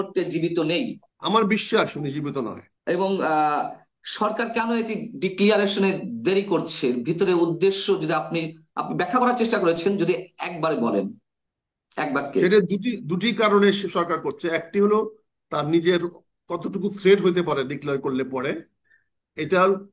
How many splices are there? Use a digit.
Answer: 2